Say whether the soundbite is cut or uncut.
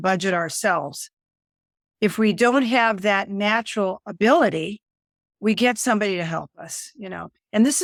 uncut